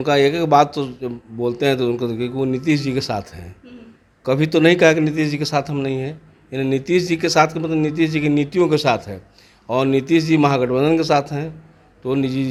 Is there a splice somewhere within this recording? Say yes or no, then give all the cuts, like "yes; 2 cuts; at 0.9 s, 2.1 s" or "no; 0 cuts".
no; 0 cuts